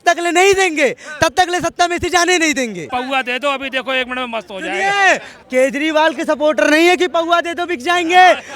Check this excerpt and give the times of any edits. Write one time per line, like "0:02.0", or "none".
0:02.9
0:05.3